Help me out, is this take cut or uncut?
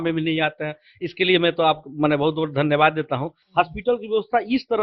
cut